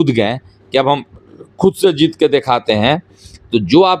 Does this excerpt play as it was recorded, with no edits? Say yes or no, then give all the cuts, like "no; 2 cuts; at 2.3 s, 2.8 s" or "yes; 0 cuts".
yes; 0 cuts